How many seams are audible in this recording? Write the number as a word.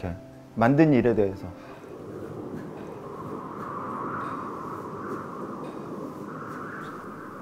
two